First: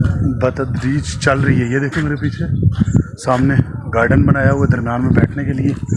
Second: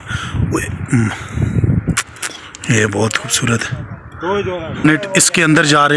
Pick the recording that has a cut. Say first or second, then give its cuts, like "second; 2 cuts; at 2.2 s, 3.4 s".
second; 1 cut; at 4.8 s